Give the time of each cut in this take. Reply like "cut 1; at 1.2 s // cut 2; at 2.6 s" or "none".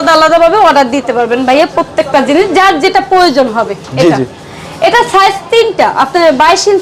none